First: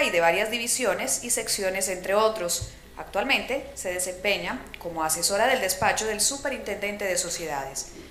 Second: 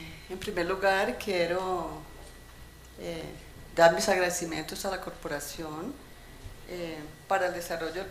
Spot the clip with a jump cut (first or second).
second